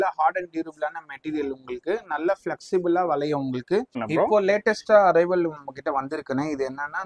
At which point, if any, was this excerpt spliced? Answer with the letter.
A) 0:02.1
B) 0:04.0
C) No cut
B